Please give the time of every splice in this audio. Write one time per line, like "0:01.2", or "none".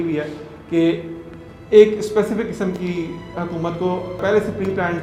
none